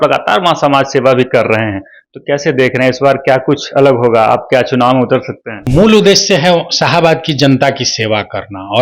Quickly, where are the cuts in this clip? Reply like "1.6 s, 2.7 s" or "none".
5.6 s